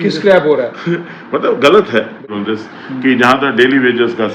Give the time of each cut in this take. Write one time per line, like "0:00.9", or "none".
0:02.4